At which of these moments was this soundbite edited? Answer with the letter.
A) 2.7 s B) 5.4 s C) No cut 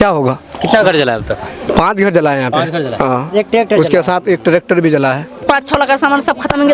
B